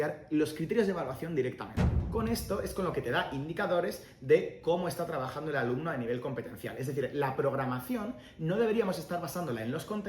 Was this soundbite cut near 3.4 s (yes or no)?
no